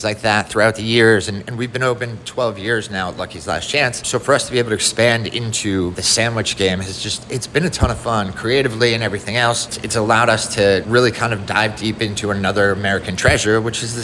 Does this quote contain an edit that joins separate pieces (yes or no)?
yes